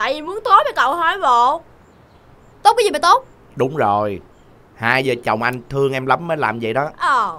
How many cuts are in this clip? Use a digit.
1